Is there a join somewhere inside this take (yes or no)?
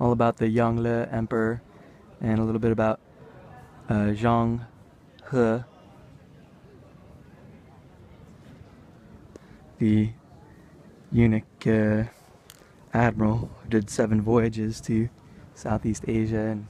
yes